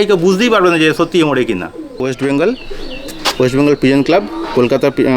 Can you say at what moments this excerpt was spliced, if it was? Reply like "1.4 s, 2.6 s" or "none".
1.9 s